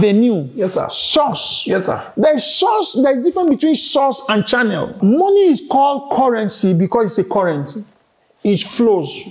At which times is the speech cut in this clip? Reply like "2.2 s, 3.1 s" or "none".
4.9 s